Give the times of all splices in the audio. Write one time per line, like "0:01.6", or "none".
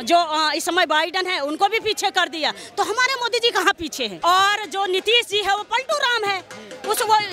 0:04.1